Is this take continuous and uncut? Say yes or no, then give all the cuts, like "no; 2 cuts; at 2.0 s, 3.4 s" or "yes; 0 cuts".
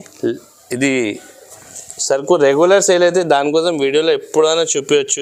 yes; 0 cuts